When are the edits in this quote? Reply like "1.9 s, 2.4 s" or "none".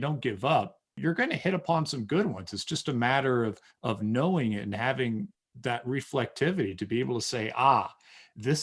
1.0 s

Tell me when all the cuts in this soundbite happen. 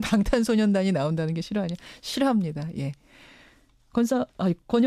none

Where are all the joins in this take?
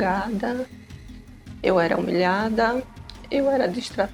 none

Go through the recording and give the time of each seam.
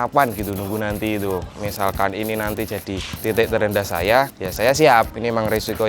1.6 s, 3.1 s, 4.4 s

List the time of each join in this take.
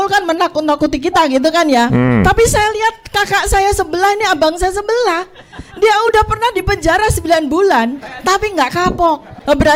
none

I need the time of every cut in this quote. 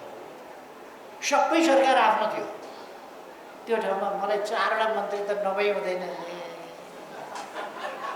none

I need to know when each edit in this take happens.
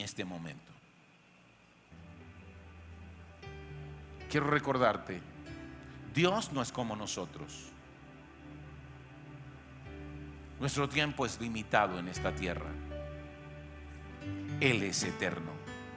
1.9 s

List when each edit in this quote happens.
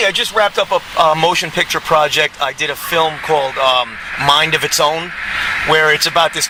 none

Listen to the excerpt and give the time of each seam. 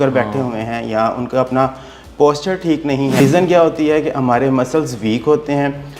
3.2 s

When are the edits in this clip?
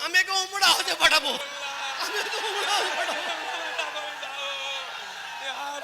1.4 s

